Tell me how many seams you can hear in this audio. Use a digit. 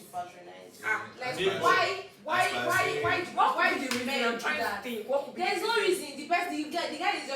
0